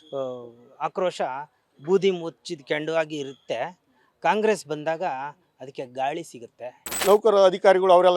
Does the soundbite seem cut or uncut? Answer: cut